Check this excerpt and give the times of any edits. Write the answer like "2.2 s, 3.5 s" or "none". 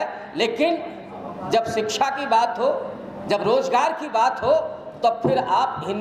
none